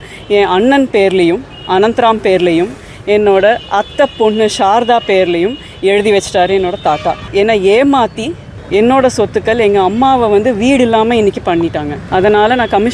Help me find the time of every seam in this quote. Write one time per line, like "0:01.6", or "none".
0:07.2
0:12.0

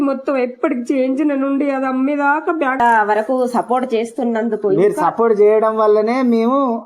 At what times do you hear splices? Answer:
0:02.8

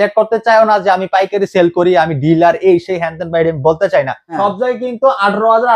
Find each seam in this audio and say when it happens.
0:04.2

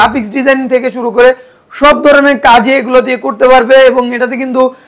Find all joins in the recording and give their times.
none

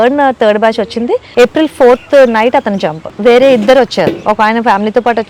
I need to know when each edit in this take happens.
0:01.2
0:02.0
0:03.0

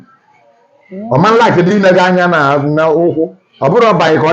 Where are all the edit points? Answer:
none

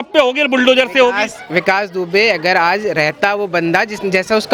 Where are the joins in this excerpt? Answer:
none

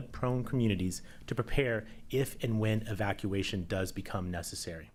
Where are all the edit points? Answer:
none

